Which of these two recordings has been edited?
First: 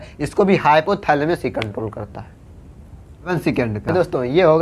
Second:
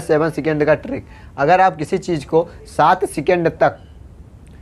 first; 1 cut; at 3.3 s

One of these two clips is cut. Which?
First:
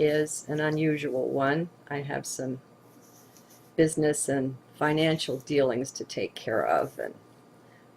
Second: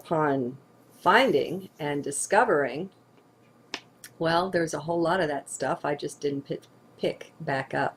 first; 1 cut; at 2.1 s

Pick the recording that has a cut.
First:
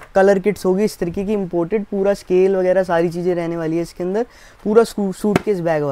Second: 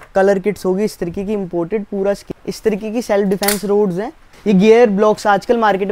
second; 2 cuts; at 2.2 s, 4.3 s

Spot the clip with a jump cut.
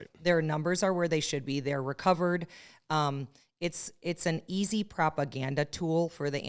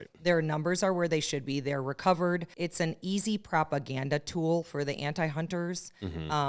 second; 1 cut; at 2.5 s

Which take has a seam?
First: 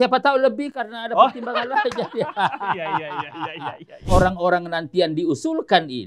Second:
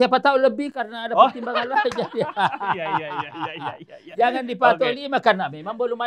first; 1 cut; at 4.1 s

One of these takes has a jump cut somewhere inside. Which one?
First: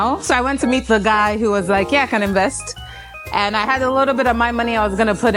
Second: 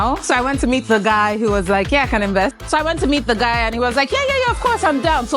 second; 1 cut; at 2.6 s

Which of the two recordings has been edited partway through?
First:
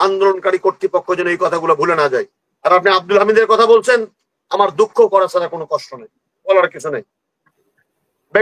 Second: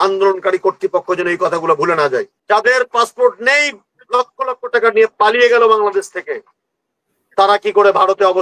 second; 1 cut; at 2.3 s

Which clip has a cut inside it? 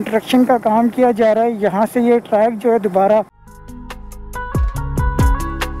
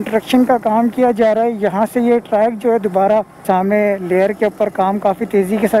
second; 1 cut; at 3.4 s

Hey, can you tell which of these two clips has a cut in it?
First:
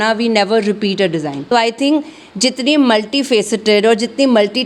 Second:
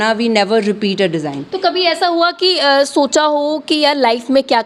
first; 1 cut; at 1.4 s

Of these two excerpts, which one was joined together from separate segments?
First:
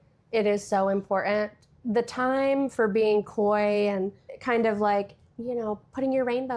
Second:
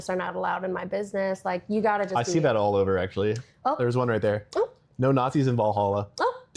first; 2 cuts; at 1.7 s, 4.3 s

